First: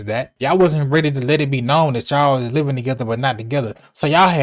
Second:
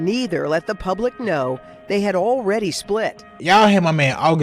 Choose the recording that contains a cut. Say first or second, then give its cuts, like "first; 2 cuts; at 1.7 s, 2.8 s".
second; 1 cut; at 3.4 s